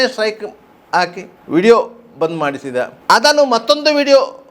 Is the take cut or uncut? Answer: cut